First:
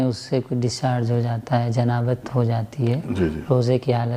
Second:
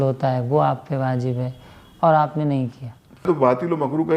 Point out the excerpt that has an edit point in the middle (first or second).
second